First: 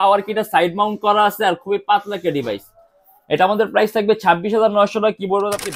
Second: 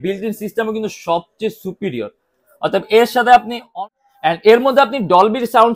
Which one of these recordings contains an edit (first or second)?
second